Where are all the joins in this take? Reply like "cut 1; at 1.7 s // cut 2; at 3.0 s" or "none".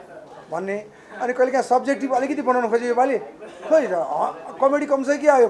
none